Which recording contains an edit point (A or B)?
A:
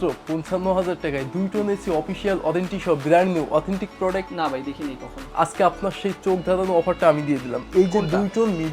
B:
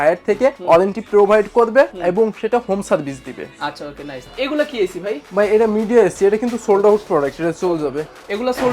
B